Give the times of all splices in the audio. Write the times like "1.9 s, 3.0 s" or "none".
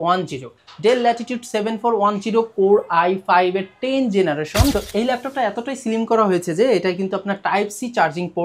4.7 s